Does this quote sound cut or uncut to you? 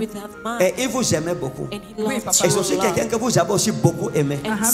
uncut